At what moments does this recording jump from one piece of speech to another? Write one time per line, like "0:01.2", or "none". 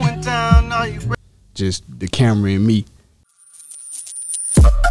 0:03.3